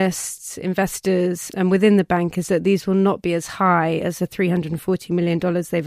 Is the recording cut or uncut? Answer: uncut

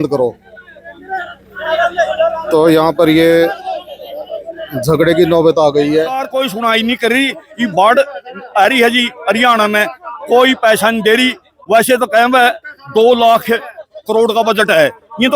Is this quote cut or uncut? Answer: cut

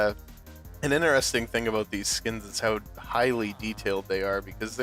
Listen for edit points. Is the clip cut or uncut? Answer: uncut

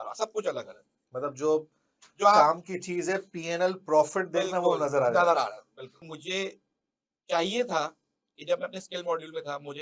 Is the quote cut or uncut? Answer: cut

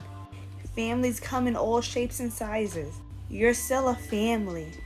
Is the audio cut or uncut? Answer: cut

